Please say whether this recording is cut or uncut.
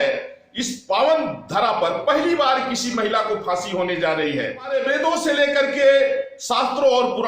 cut